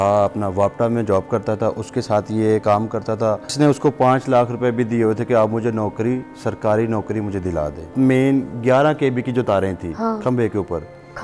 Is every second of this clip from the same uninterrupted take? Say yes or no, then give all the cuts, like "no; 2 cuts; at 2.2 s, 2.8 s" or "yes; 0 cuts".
no; 2 cuts; at 3.5 s, 7.9 s